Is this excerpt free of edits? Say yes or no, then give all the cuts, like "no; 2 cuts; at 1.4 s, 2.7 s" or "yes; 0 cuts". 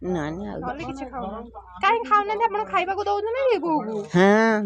yes; 0 cuts